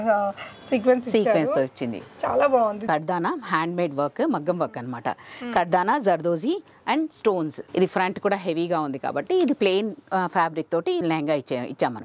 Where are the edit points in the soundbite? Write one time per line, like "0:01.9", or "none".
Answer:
0:02.8
0:07.6
0:11.0